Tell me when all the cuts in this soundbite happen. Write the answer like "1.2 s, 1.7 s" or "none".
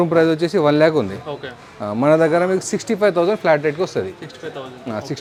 none